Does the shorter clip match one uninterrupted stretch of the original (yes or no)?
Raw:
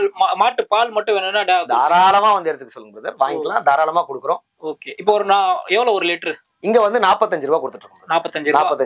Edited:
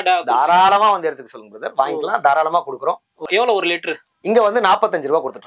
no